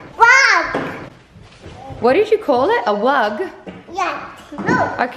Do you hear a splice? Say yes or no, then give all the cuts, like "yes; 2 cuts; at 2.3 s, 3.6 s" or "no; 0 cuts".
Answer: yes; 1 cut; at 1.0 s